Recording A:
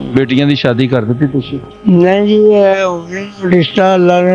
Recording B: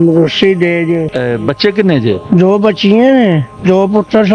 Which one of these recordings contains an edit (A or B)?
B